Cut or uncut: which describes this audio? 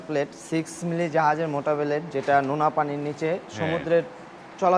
uncut